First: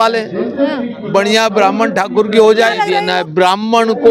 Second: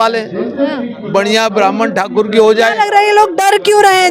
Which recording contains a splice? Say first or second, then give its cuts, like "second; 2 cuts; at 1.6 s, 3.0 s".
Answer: first; 1 cut; at 2.9 s